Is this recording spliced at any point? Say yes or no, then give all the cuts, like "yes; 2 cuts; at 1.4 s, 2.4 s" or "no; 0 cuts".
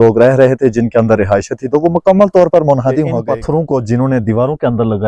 yes; 1 cut; at 3.1 s